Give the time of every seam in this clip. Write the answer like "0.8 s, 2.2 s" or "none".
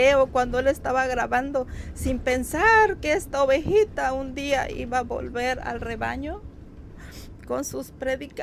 none